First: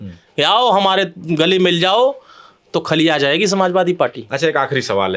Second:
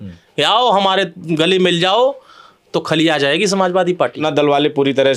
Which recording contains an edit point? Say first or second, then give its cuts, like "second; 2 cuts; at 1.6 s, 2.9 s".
second; 1 cut; at 4.2 s